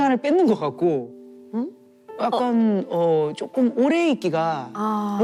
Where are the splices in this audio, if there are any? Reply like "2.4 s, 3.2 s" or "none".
none